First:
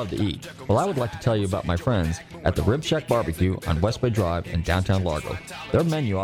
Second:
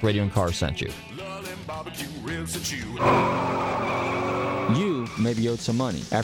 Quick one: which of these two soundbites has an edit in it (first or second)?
second